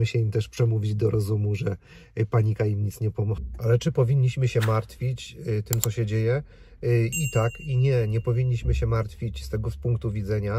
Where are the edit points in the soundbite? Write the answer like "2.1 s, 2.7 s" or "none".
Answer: 3.5 s